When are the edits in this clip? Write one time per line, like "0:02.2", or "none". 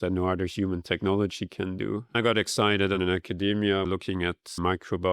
0:02.1